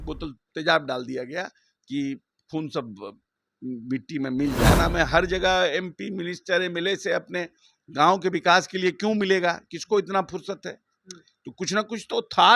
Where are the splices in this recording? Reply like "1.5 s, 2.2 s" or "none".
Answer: 4.8 s